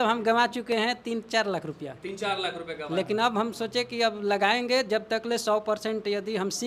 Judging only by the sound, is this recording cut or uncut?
uncut